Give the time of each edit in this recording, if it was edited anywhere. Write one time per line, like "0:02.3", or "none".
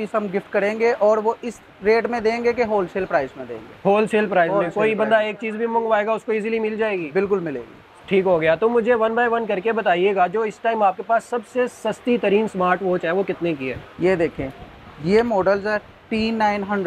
none